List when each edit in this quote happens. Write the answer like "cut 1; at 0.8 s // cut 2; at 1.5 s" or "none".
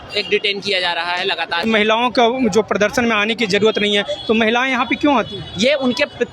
cut 1; at 1.6 s